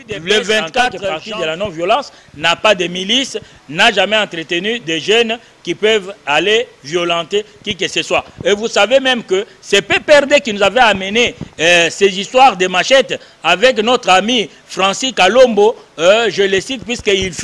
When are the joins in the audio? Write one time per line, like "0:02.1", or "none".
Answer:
0:01.2